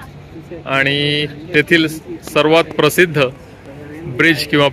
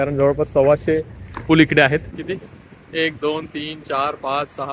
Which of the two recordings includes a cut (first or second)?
second